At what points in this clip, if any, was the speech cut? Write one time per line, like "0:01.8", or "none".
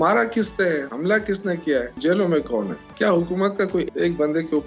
0:00.9
0:02.0
0:02.8
0:03.9